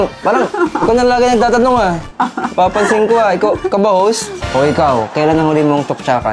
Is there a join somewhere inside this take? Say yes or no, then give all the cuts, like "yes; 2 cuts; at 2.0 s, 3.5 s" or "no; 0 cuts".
yes; 1 cut; at 4.4 s